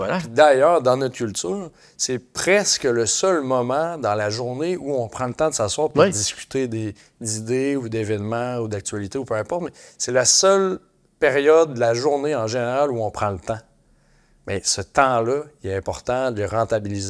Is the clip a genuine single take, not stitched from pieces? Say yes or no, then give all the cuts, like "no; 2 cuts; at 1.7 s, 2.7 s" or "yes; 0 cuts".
yes; 0 cuts